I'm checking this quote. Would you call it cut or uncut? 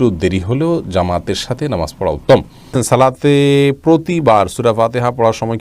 cut